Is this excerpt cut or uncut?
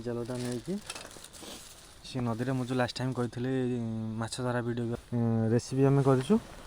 cut